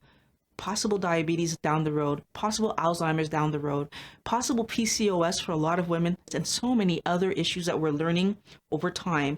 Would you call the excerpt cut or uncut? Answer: cut